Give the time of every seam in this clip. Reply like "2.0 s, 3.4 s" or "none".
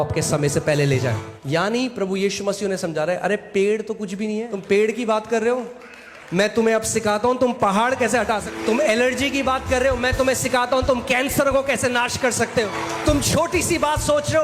1.3 s, 4.5 s, 8.5 s, 12.7 s